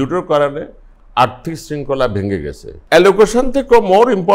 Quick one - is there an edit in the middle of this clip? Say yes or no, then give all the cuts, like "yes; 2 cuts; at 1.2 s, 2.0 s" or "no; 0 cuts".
yes; 1 cut; at 2.7 s